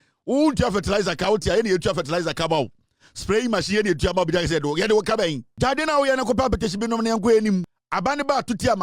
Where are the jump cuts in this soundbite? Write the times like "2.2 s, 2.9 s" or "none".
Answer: 5.4 s, 7.8 s